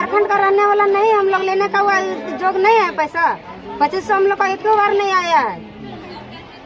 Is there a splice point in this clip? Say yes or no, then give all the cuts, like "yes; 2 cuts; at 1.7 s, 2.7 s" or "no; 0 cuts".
no; 0 cuts